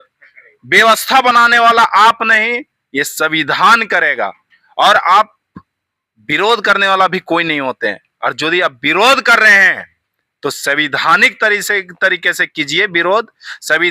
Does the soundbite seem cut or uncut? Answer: uncut